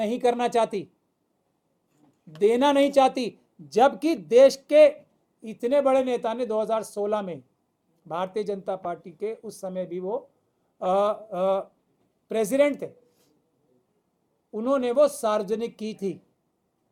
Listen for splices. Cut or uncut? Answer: uncut